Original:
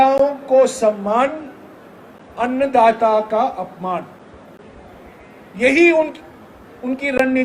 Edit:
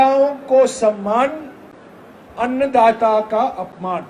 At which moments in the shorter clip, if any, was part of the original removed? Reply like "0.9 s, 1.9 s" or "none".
none